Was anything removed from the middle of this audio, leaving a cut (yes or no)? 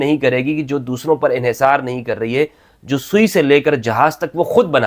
no